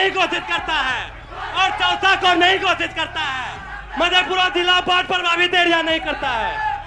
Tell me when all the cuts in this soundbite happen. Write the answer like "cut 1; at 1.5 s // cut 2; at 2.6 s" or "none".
none